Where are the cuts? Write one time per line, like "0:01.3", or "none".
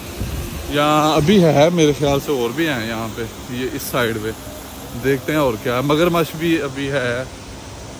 none